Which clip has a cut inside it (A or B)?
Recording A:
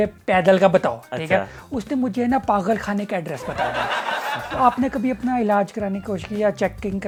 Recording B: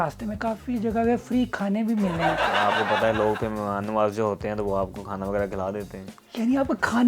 B